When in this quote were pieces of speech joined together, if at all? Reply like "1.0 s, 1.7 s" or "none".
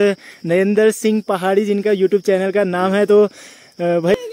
none